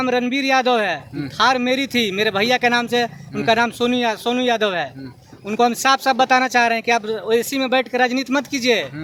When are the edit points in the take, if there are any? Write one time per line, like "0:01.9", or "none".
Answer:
none